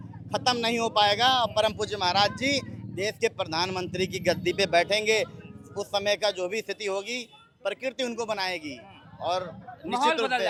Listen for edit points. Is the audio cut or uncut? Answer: uncut